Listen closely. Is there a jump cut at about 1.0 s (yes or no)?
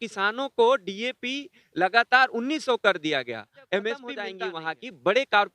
no